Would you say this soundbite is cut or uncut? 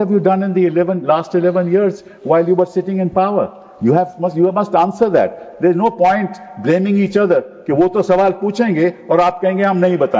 uncut